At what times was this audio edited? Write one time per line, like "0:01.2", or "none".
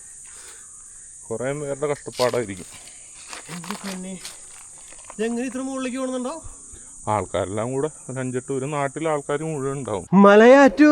0:10.0